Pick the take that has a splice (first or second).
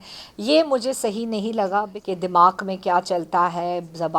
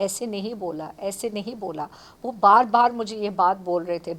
first